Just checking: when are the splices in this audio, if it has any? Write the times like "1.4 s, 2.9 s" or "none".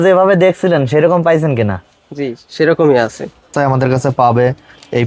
3.5 s